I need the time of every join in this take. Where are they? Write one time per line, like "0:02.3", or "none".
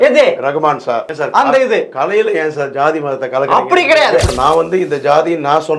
0:01.0
0:04.3